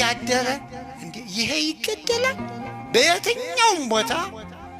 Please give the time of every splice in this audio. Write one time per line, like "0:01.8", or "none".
0:02.8